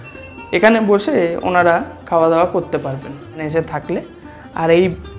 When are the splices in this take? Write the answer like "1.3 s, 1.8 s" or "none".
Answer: 3.4 s